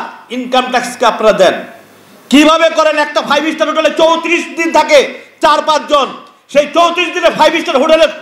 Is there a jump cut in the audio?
no; 0 cuts

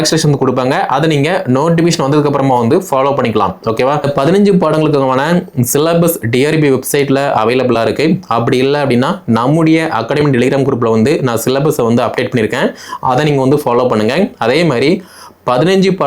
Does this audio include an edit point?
yes; 1 cut; at 4.1 s

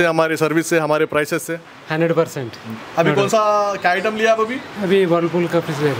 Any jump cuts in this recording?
no; 0 cuts

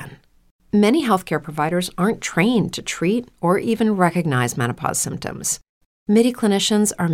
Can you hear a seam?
no; 0 cuts

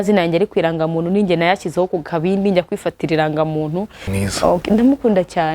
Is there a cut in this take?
yes; 1 cut; at 4.1 s

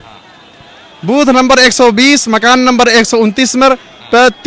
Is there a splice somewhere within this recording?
no; 0 cuts

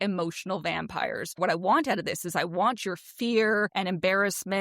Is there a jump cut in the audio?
yes; 2 cuts; at 1.4 s, 3.7 s

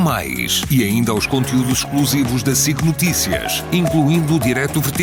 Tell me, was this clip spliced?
no; 0 cuts

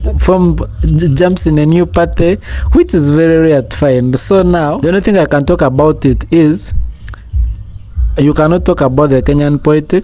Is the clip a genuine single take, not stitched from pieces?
no; 1 cut; at 4.7 s

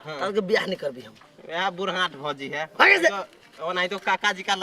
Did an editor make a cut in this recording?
no; 0 cuts

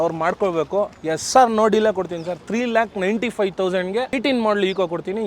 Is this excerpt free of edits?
no; 1 cut; at 4.2 s

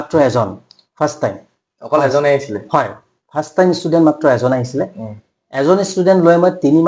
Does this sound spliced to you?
no; 0 cuts

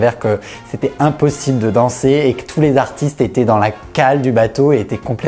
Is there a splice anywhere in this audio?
no; 0 cuts

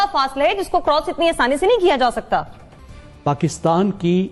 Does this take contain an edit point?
no; 0 cuts

